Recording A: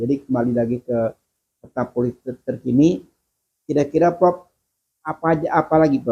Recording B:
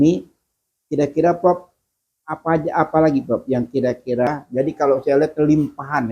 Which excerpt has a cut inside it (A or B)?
B